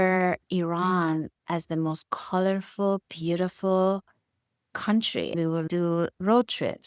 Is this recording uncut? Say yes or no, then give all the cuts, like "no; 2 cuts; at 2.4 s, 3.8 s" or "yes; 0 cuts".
yes; 0 cuts